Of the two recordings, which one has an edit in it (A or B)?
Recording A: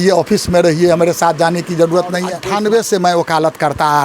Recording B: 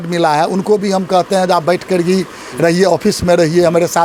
A